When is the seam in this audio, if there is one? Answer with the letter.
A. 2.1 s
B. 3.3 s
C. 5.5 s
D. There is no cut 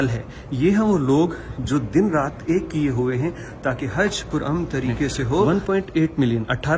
C